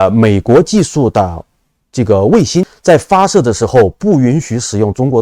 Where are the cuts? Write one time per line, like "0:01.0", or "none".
0:02.7